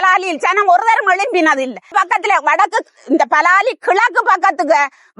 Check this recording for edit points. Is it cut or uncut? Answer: cut